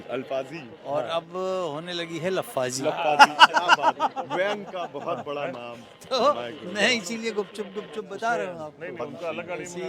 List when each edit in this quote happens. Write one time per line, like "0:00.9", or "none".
none